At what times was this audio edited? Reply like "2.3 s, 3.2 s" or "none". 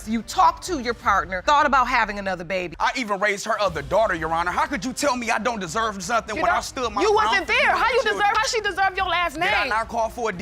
2.7 s